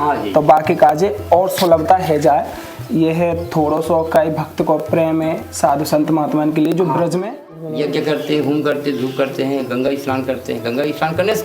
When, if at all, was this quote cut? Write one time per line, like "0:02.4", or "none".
0:07.3

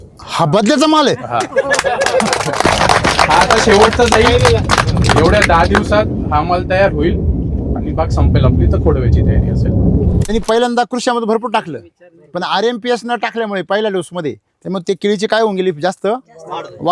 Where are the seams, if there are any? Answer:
0:10.2

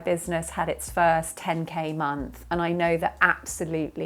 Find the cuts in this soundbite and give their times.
none

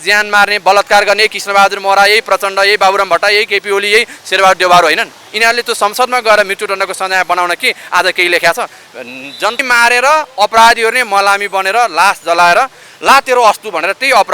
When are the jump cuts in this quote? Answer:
0:09.6

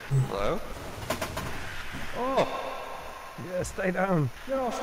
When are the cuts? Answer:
none

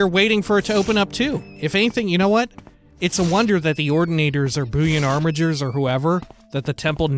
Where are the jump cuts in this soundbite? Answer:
0:01.6

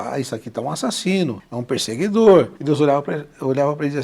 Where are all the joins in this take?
0:01.5
0:02.6

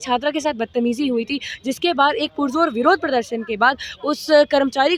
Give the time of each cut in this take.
none

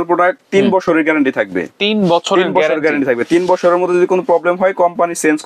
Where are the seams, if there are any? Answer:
none

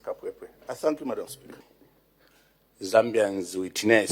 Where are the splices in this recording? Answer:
0:01.6

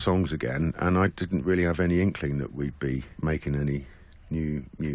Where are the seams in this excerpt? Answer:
0:03.1

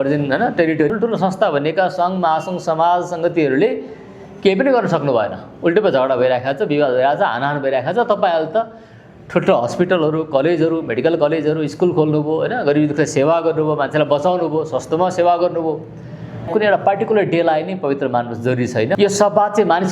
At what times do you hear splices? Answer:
0:00.9
0:16.5
0:19.0

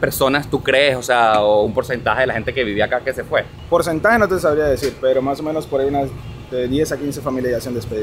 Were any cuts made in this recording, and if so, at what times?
none

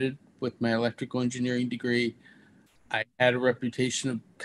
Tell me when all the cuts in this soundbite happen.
0:02.7

